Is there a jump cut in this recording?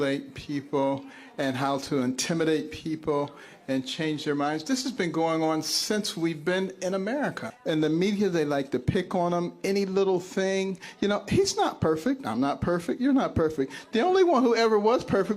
yes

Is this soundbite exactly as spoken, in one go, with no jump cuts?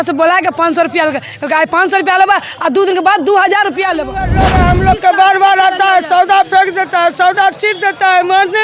no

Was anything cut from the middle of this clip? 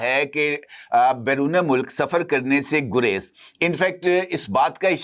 no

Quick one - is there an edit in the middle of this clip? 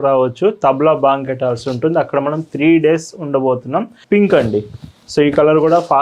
yes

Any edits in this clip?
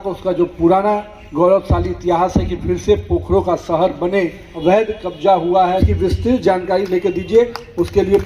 yes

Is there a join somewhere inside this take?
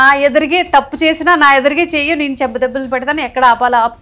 no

